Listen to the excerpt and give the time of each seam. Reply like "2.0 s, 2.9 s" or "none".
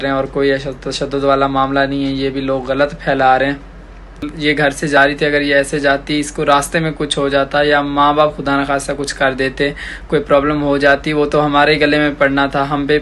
4.3 s

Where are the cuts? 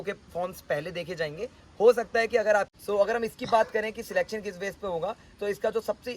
2.7 s

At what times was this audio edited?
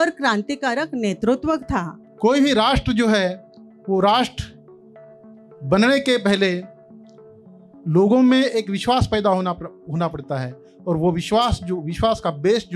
2.0 s

